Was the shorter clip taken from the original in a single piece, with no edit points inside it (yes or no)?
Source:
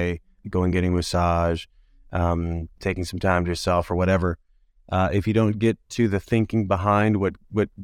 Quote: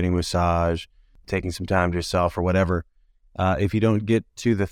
no